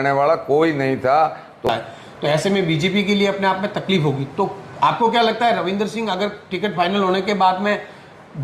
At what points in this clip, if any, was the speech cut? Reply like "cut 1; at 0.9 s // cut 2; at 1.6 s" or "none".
cut 1; at 1.6 s